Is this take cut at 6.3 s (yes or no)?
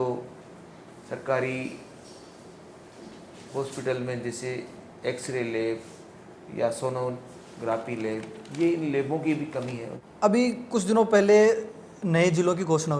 no